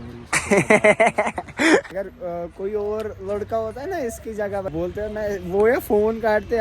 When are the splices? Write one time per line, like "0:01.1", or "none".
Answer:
0:01.9
0:04.7

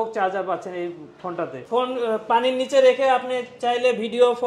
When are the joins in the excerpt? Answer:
0:01.6

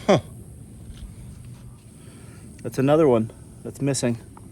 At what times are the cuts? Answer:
0:01.8

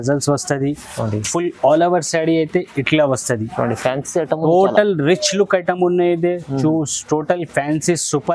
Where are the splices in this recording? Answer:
none

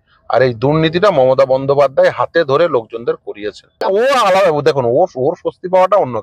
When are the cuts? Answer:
0:03.8

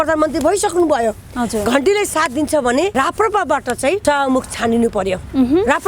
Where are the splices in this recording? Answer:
0:02.9
0:04.0

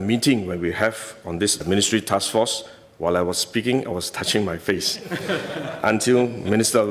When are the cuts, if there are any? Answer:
none

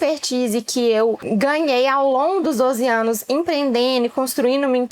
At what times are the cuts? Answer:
0:01.2

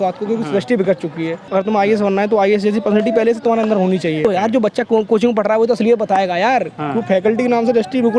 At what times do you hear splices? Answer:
0:01.4
0:04.2
0:06.8

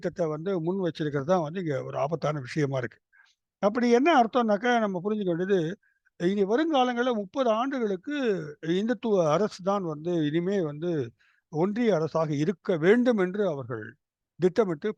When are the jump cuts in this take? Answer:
none

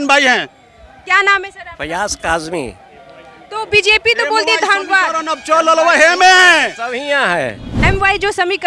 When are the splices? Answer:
0:07.7

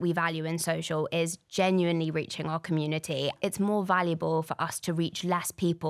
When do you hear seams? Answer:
0:03.4

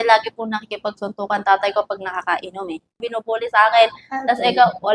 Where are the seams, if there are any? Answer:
0:03.0

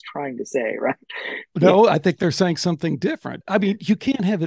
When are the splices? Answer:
0:01.5
0:03.3

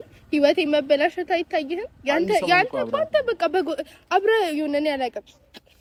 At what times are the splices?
none

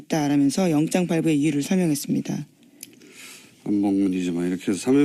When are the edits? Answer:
none

